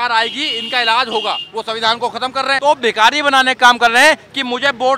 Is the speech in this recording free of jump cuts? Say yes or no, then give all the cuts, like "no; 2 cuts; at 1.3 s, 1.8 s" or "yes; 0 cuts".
no; 2 cuts; at 1.5 s, 2.6 s